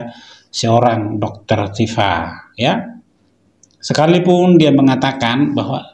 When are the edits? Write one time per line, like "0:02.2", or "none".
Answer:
none